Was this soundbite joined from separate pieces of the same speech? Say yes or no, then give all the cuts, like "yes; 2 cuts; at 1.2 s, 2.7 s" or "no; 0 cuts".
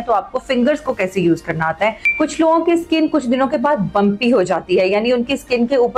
no; 0 cuts